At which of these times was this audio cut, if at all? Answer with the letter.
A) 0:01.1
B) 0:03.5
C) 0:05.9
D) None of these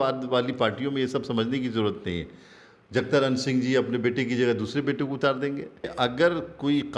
C